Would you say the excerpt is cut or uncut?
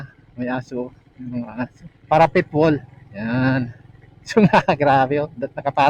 cut